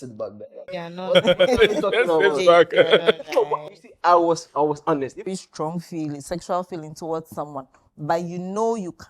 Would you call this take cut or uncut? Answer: cut